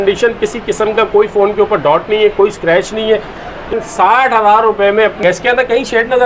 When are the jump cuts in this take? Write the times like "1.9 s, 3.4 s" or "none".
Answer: 3.7 s, 5.2 s